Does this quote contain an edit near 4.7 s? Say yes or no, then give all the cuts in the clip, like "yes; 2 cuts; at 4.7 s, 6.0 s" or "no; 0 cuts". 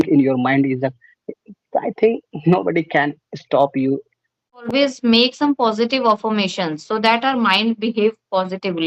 yes; 1 cut; at 4.7 s